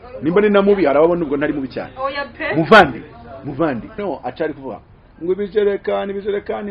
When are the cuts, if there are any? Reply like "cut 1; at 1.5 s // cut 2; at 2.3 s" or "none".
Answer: cut 1; at 4.0 s

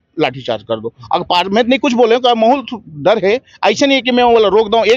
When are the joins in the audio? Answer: none

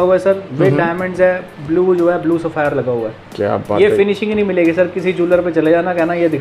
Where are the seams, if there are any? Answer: none

